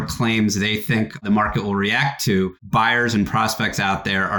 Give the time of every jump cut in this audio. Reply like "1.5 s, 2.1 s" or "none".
1.2 s, 2.6 s